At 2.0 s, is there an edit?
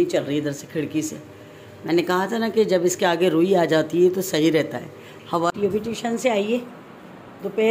no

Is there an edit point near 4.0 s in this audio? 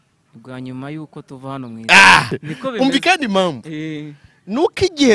no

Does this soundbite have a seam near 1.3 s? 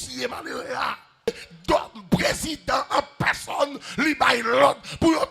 yes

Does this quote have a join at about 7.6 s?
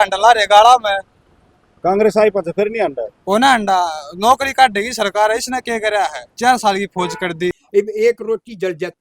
yes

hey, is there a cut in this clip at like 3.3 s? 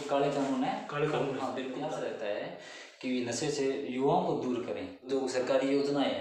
no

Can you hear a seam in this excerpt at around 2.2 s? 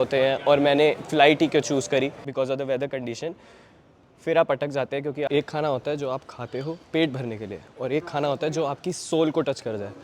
yes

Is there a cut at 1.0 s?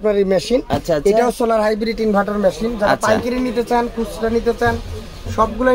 no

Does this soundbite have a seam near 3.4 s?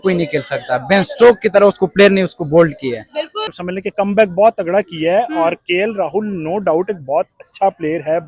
yes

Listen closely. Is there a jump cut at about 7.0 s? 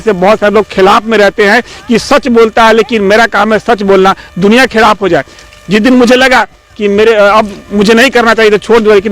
no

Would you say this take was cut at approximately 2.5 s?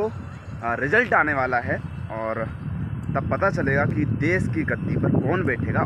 no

